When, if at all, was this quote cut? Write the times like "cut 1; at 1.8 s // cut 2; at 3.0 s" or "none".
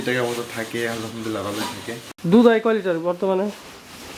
cut 1; at 2.0 s